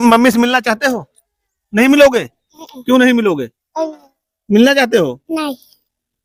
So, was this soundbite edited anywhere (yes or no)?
no